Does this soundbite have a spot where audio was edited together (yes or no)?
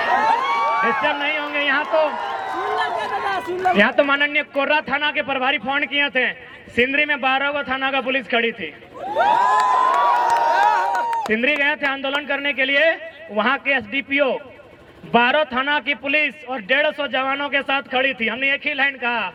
no